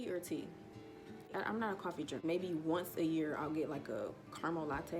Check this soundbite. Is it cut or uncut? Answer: cut